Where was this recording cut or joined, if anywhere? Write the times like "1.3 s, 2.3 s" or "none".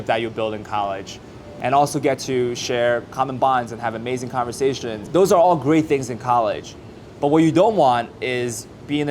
1.5 s, 5.0 s